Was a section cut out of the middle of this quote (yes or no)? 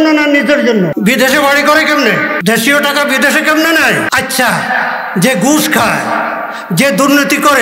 yes